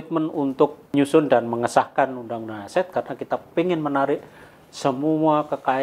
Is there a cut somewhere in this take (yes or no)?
yes